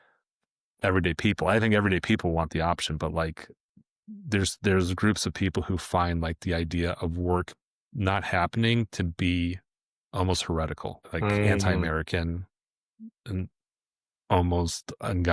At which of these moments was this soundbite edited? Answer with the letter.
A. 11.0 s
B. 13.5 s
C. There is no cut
A